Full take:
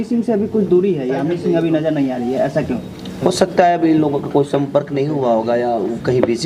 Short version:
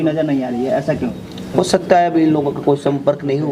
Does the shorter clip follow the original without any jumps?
yes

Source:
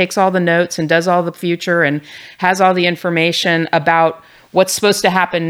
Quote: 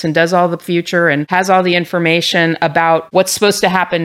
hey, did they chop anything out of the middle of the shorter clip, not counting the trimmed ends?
yes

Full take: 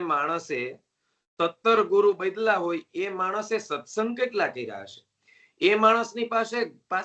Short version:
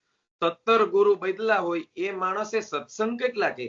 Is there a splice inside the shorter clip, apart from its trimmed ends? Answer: no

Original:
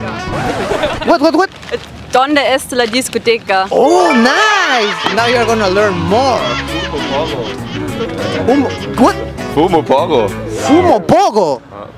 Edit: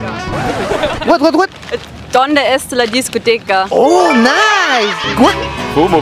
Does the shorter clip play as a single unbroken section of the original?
no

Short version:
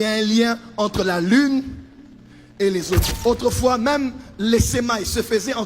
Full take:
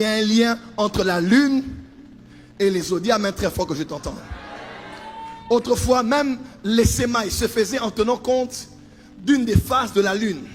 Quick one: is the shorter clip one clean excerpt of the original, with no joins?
no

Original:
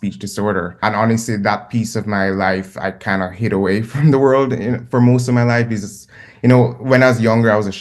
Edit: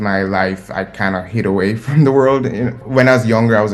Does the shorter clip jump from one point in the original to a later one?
yes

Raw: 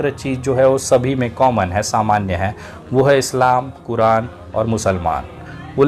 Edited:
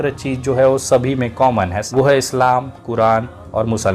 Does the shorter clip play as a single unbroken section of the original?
no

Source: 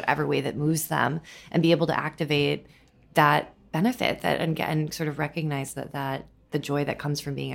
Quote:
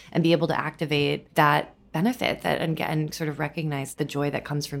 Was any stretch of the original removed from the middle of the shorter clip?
yes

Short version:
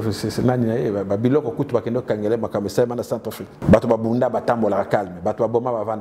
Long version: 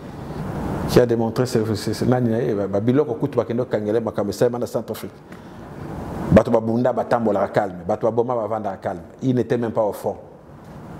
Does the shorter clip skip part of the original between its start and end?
yes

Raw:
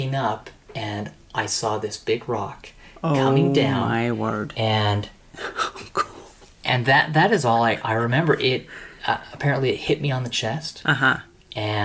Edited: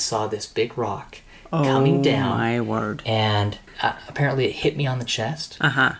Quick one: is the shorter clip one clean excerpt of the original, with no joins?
no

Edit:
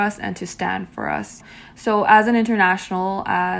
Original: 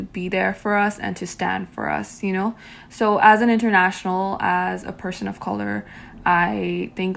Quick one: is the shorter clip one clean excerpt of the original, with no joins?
no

